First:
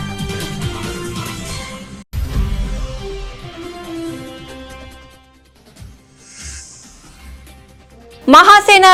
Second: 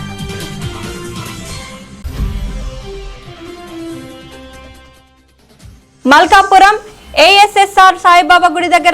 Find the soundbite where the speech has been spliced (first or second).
second